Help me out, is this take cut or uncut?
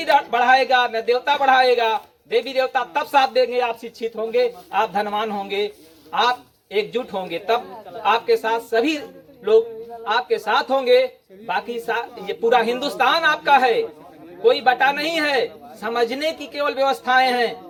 uncut